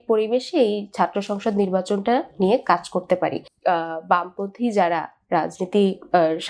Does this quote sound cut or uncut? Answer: cut